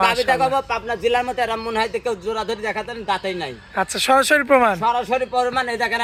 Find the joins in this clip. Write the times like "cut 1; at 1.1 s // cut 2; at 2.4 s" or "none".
none

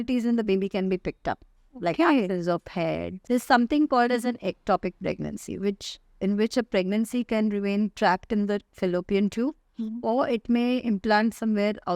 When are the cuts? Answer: cut 1; at 3.1 s

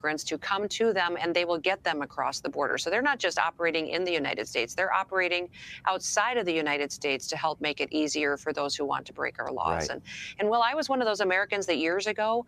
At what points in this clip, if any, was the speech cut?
cut 1; at 9.7 s

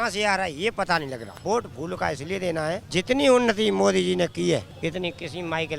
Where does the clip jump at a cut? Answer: cut 1; at 1.4 s // cut 2; at 2.9 s // cut 3; at 4.7 s

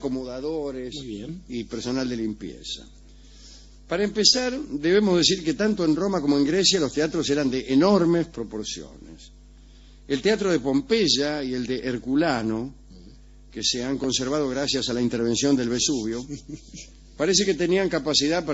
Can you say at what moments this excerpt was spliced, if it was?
cut 1; at 9.0 s

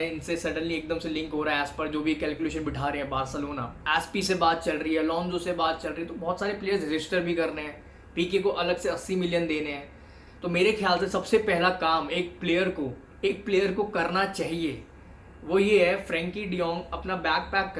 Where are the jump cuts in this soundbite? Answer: cut 1; at 3.7 s

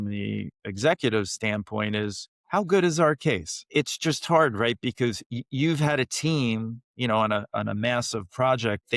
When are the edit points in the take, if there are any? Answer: cut 1; at 2.3 s // cut 2; at 3.7 s

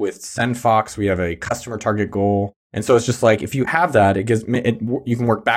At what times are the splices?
none

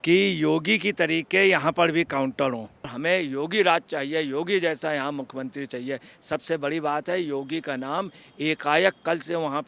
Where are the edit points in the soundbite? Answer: cut 1; at 2.9 s

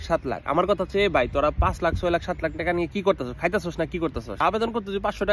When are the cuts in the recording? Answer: cut 1; at 4.4 s

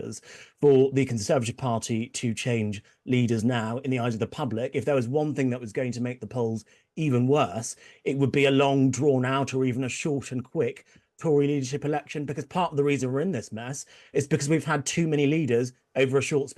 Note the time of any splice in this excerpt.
none

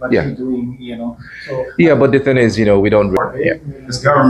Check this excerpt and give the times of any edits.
cut 1; at 3.2 s

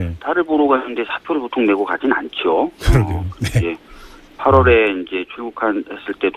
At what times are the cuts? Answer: cut 1; at 5.1 s

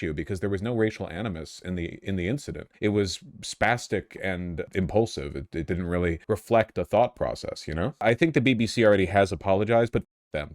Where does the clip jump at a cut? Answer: cut 1; at 2.7 s // cut 2; at 4.7 s // cut 3; at 6.2 s // cut 4; at 8.0 s

